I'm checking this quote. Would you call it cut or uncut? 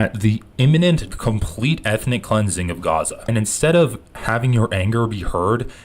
cut